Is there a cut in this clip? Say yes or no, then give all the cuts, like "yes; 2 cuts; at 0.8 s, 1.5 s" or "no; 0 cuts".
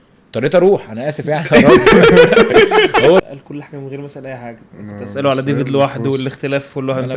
yes; 1 cut; at 3.2 s